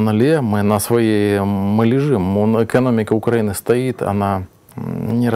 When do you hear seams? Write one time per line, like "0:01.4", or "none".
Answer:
none